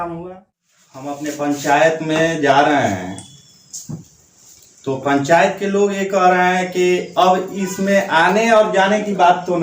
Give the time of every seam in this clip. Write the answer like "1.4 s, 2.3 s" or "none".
1.1 s